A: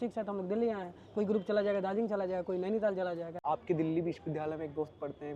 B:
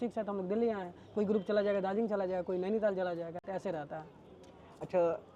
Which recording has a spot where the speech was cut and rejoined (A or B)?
A